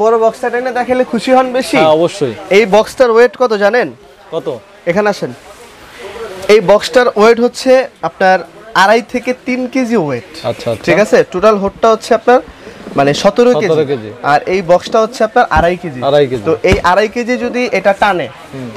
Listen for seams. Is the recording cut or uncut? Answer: uncut